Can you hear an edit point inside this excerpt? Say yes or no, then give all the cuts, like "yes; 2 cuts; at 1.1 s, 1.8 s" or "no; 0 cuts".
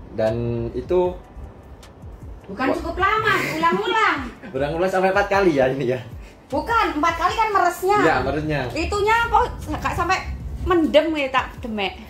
no; 0 cuts